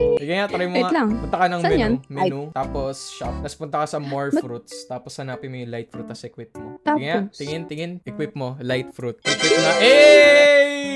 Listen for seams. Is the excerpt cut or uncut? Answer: cut